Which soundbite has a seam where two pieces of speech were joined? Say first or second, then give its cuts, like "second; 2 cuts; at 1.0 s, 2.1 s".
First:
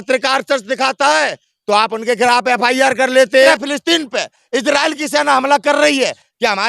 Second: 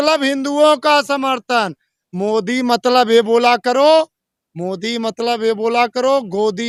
first; 1 cut; at 3.5 s